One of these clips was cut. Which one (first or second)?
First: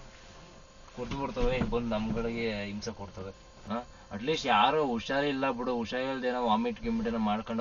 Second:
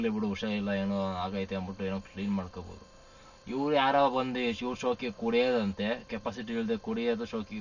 first